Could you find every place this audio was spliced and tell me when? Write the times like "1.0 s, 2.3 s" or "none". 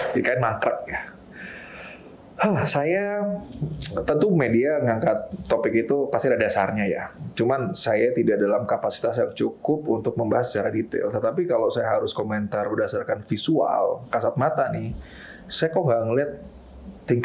none